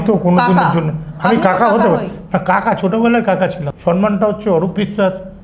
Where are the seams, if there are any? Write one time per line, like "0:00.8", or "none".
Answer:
0:03.7